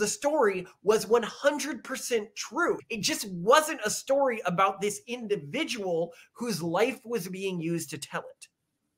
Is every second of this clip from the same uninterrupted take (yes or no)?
no